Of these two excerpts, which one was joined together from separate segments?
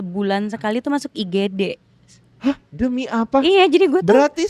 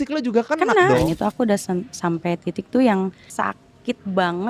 second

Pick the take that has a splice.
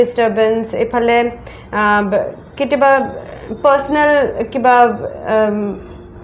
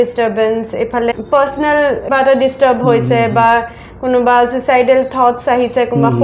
second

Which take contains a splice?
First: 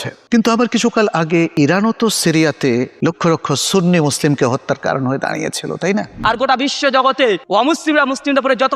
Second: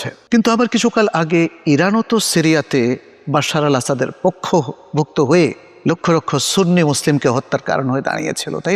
first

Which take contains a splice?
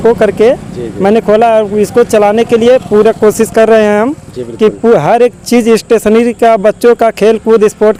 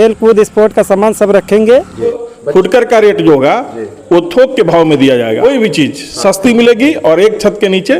second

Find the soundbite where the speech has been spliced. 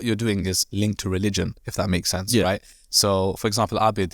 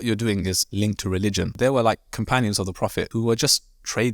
second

